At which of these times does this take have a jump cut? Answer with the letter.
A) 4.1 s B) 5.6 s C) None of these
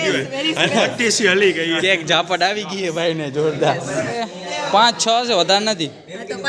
A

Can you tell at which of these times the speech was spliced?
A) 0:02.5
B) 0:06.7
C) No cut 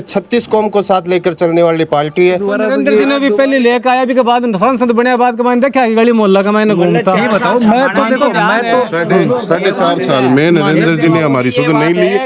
A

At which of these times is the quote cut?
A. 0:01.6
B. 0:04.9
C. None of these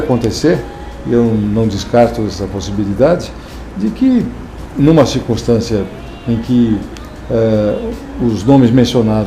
C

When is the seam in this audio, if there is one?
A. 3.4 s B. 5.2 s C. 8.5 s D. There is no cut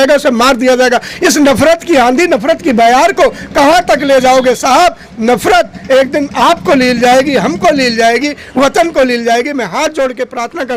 D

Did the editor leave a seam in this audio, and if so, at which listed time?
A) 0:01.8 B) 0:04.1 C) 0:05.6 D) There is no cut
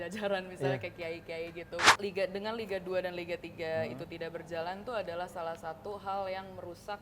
A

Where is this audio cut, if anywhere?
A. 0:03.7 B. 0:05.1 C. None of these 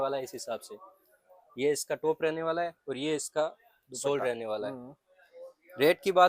C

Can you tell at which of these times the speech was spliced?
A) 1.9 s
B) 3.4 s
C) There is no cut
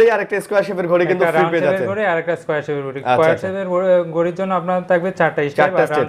C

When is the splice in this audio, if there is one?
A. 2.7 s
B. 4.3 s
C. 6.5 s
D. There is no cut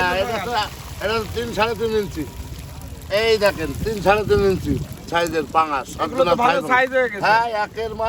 D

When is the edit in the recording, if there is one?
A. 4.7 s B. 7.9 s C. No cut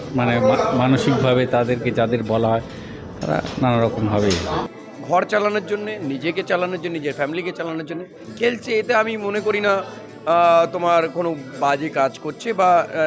A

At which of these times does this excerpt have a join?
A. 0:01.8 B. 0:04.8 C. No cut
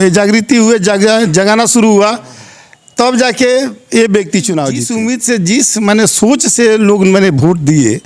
B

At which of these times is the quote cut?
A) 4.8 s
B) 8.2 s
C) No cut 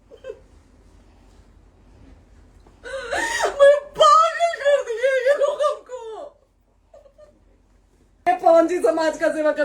B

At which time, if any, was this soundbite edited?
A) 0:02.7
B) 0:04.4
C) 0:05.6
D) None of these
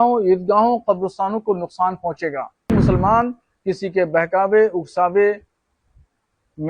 A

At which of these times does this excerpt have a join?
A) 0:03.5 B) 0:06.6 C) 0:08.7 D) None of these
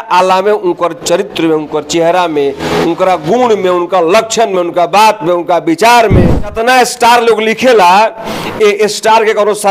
B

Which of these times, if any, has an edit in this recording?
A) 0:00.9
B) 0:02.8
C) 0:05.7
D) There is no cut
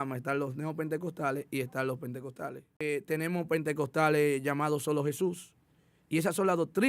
B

